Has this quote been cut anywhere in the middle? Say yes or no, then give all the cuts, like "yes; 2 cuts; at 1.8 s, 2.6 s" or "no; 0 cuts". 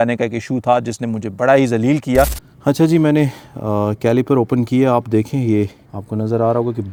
no; 0 cuts